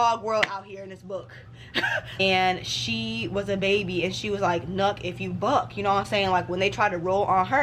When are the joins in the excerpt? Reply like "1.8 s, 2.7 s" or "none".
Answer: 2.2 s